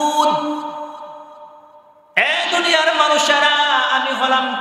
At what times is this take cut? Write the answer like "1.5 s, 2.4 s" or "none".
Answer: none